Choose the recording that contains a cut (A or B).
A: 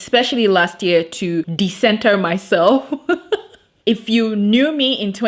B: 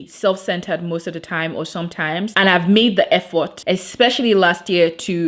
A